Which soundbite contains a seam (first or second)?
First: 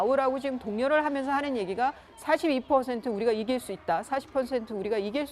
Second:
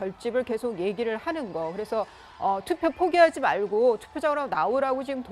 first